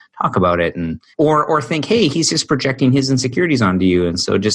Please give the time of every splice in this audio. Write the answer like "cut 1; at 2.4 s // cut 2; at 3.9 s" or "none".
cut 1; at 1.0 s